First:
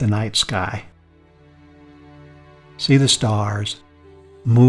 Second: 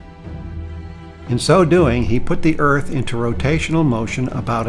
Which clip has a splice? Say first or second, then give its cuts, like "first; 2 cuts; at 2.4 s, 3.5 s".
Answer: second; 1 cut; at 1.4 s